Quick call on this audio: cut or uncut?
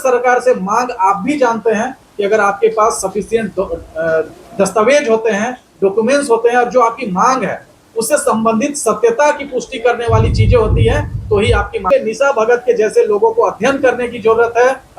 cut